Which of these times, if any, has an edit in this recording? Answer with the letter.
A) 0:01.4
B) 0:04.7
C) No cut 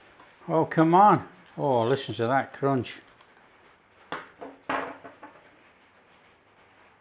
A